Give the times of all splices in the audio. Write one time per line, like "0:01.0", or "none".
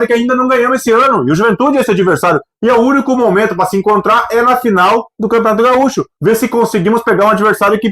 0:06.1

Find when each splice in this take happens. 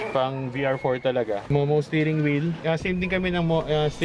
0:01.4
0:02.6

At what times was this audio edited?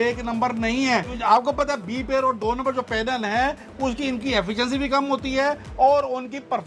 0:01.1

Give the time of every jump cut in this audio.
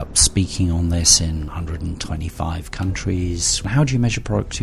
0:01.5
0:03.7

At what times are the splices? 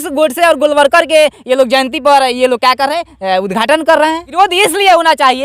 0:04.3

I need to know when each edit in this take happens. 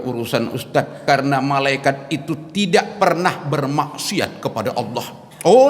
0:01.0

